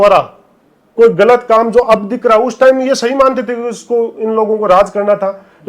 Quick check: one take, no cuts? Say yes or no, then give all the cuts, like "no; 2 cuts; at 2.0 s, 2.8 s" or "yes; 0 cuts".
yes; 0 cuts